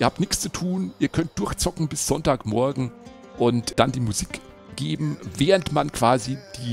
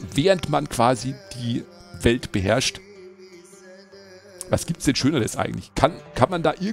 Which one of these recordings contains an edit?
first; 1 cut; at 3.7 s

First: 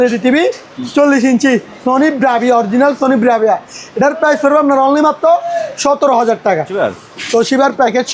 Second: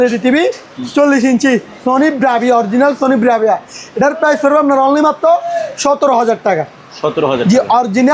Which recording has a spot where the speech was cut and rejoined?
first; 1 cut; at 6.7 s

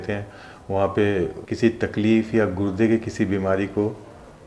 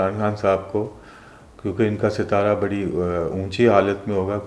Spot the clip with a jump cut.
first; 1 cut; at 1.4 s

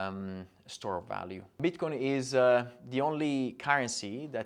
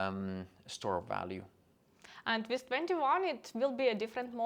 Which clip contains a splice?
first; 1 cut; at 1.6 s

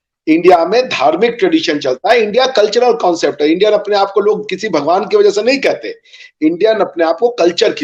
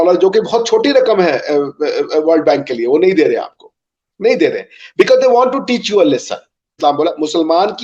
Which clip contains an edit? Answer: second; 1 cut; at 6.8 s

